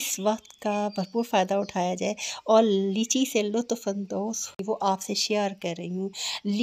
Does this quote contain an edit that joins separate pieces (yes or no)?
yes